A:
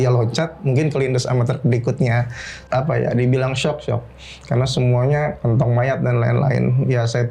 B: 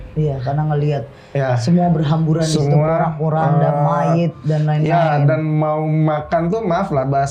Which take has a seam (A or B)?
A